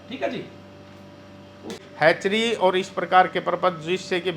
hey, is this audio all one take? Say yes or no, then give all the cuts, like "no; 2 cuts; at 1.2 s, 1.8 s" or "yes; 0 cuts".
no; 1 cut; at 1.8 s